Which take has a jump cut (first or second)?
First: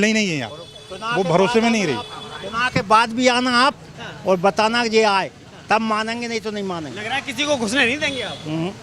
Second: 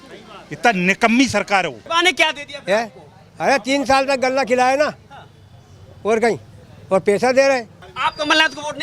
second